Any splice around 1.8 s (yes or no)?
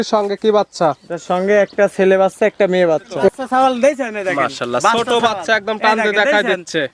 no